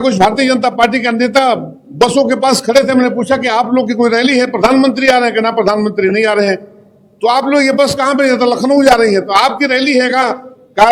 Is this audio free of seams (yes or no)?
yes